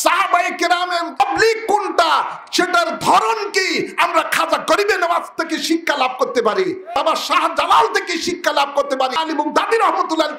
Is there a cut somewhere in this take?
yes; 3 cuts; at 1.2 s, 6.9 s, 9.2 s

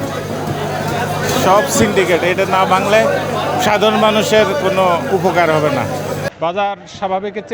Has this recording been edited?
no; 0 cuts

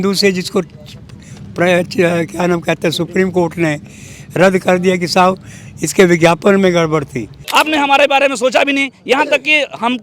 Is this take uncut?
no; 1 cut; at 7.4 s

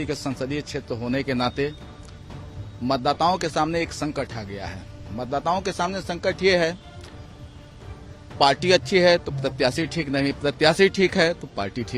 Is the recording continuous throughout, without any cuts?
yes; 0 cuts

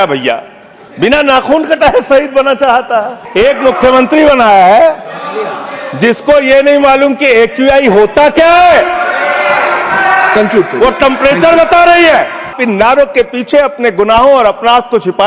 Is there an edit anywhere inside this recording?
yes; 2 cuts; at 3.2 s, 12.6 s

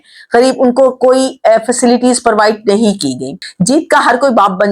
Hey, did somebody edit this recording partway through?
yes; 1 cut; at 3.5 s

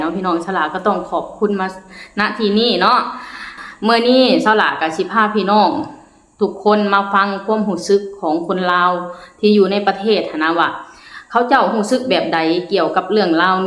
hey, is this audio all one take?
no; 1 cut; at 3.5 s

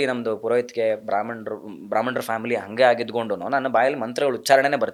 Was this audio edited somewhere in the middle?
no; 0 cuts

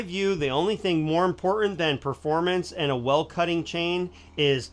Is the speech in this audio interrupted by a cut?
no; 0 cuts

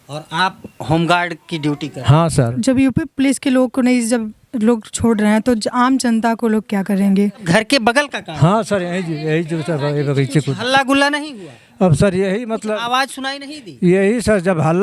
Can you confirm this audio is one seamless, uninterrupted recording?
no; 2 cuts; at 2.5 s, 7.4 s

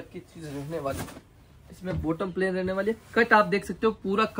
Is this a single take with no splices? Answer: yes; 0 cuts

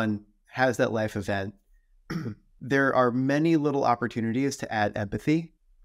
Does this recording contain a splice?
no; 0 cuts

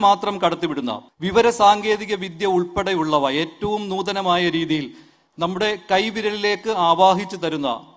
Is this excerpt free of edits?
no; 1 cut; at 1.0 s

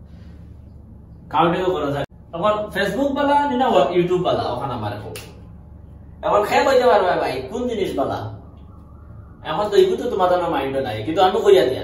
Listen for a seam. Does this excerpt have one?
yes; 1 cut; at 2.1 s

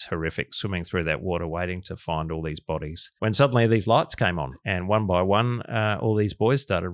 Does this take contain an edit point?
yes; 2 cuts; at 3.0 s, 4.5 s

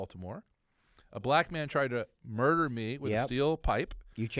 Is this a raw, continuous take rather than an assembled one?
yes; 0 cuts

